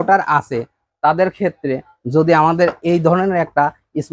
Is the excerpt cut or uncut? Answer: uncut